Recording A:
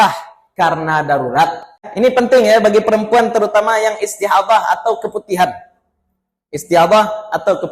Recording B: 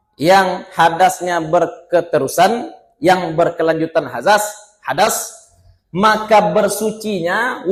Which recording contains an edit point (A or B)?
A